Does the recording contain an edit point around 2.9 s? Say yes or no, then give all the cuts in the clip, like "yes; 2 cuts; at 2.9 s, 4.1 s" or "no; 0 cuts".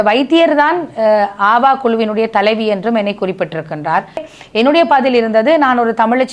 no; 1 cut; at 4.3 s